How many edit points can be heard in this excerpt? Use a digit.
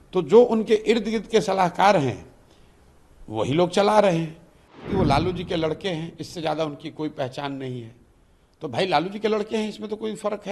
1